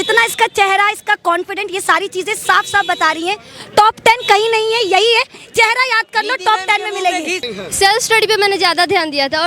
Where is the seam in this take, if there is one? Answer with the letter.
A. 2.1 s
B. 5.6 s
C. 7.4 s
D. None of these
C